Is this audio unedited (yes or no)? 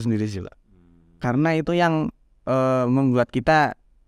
yes